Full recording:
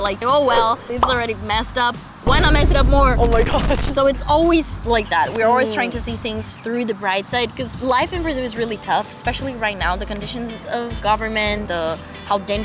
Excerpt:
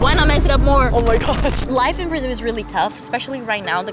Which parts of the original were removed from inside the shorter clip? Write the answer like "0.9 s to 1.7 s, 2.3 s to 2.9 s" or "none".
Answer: 3.9 s to 7.7 s